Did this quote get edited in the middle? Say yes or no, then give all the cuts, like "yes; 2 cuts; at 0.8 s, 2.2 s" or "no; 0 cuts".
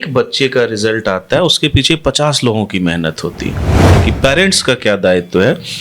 yes; 1 cut; at 4.0 s